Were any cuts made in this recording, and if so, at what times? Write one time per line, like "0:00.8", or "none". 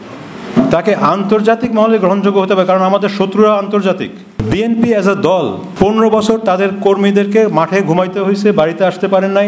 0:04.5
0:05.6